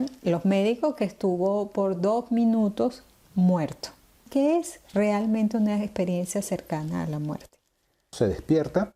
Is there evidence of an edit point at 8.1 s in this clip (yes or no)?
yes